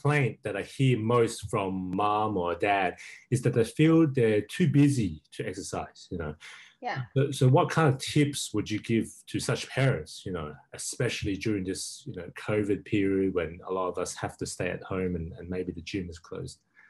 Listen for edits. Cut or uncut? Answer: cut